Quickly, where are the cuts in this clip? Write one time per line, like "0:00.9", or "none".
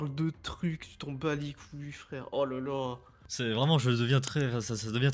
0:03.2